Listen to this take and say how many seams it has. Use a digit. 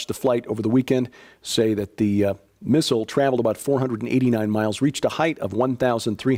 0